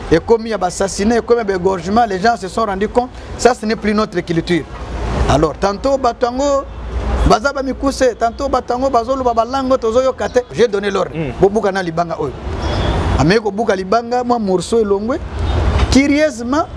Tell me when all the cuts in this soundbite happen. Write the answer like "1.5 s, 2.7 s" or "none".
10.5 s